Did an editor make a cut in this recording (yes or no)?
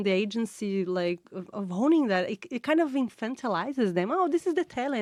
no